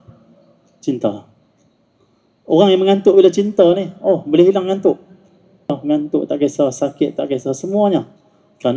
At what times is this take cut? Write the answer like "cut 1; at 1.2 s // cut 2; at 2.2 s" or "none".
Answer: cut 1; at 5.7 s